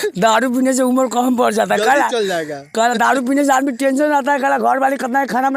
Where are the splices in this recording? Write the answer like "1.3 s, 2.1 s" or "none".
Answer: none